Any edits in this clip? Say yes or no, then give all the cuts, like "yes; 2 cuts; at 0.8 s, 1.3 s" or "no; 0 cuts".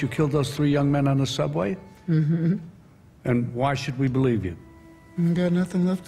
no; 0 cuts